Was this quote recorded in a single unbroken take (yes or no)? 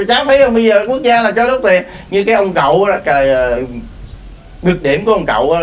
yes